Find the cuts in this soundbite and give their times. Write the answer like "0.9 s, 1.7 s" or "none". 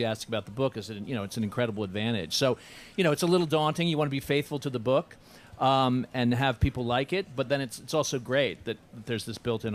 1.3 s